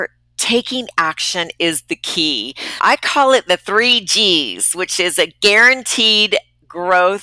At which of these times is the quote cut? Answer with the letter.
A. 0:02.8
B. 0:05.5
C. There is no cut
A